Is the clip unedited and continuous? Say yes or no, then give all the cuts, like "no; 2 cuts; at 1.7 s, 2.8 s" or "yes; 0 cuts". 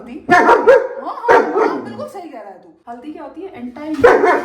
no; 1 cut; at 2.7 s